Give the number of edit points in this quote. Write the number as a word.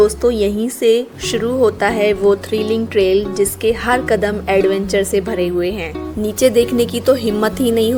zero